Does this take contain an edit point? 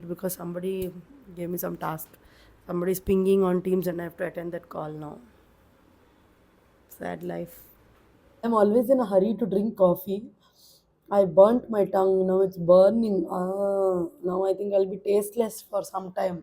yes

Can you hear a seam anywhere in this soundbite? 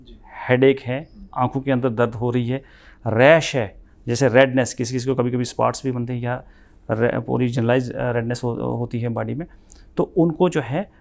no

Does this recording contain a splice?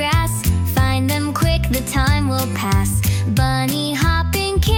no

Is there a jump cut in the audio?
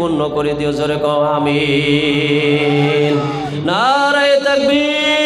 no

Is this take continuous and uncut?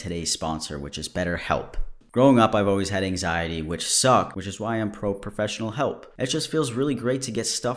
no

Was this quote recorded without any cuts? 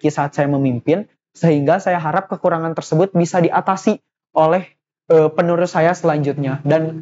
yes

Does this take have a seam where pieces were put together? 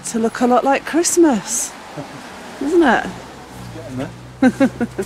no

